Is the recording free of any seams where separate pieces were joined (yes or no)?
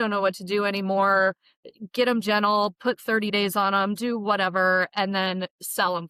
yes